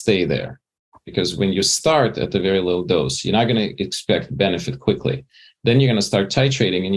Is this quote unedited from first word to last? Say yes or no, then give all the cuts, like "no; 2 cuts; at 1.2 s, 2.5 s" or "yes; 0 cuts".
no; 1 cut; at 1.0 s